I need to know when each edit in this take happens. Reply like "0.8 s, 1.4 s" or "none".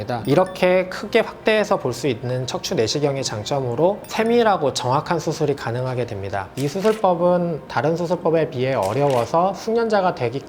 6.5 s